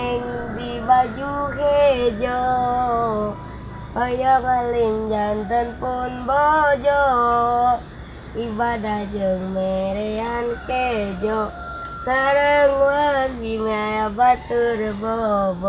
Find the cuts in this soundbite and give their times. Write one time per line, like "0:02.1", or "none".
none